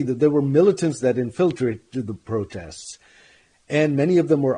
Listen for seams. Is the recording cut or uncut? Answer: uncut